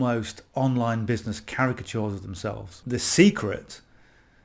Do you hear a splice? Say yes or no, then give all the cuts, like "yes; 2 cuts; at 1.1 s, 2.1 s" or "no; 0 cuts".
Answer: yes; 1 cut; at 2.8 s